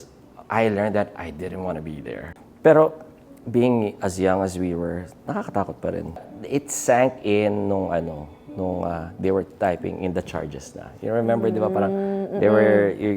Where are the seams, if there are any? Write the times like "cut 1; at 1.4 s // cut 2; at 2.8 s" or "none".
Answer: cut 1; at 2.2 s // cut 2; at 6.3 s